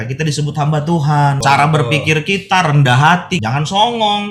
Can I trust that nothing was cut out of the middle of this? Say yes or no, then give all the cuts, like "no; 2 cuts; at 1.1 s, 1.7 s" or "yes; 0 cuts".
no; 2 cuts; at 1.4 s, 3.4 s